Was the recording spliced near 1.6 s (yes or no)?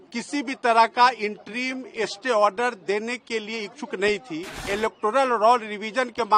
no